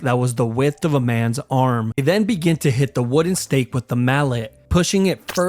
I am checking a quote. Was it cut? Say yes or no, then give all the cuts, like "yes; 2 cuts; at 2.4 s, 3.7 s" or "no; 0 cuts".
yes; 1 cut; at 1.9 s